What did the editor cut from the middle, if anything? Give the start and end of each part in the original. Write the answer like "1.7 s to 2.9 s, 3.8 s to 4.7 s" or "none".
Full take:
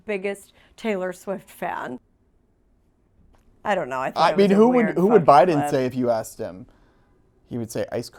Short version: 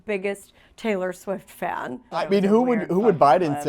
2.2 s to 4.3 s